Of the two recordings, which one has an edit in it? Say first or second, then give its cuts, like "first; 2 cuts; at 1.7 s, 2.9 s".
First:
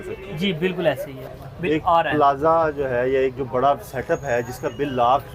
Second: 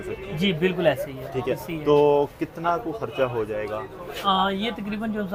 first; 1 cut; at 1.3 s